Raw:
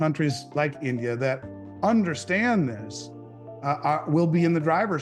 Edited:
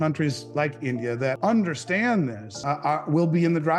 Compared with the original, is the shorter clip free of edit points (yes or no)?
no